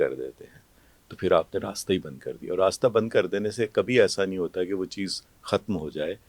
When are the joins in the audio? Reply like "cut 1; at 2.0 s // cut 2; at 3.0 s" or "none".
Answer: none